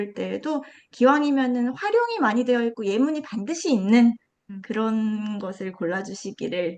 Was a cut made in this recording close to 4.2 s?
no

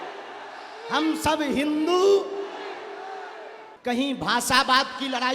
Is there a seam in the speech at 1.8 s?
no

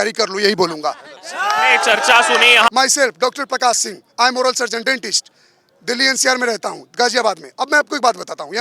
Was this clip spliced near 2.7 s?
yes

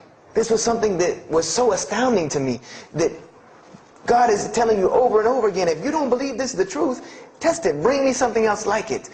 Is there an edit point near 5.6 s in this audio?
no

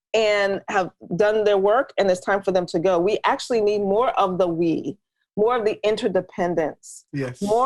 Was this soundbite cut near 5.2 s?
no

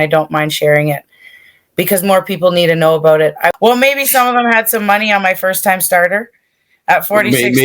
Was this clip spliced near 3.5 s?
yes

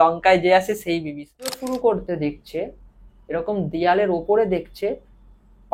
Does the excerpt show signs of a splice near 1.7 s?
yes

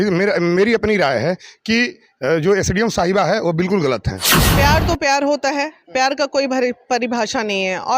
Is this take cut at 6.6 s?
no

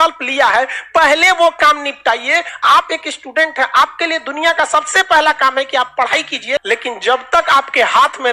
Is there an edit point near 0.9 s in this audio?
no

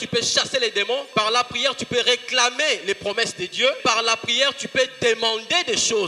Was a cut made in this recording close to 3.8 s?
yes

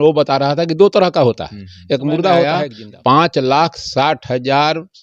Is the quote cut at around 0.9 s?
no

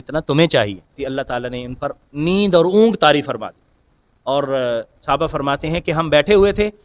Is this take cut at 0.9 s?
yes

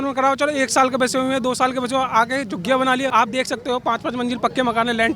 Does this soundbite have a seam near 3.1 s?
yes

